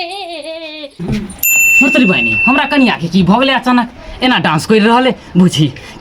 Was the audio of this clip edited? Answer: yes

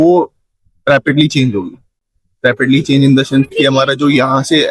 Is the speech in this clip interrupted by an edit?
no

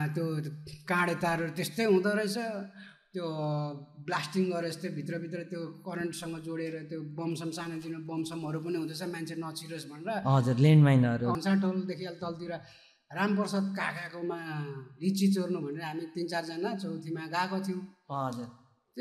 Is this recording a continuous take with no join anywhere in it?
no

